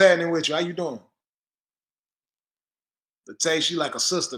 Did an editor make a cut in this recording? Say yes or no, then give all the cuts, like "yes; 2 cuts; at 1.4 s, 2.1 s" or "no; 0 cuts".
no; 0 cuts